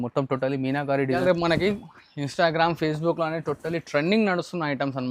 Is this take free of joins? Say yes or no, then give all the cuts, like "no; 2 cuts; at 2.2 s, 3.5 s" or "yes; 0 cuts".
no; 1 cut; at 1.2 s